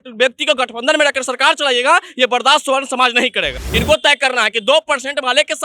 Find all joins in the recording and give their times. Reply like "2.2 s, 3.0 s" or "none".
3.7 s